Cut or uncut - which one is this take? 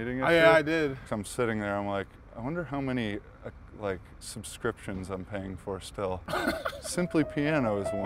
cut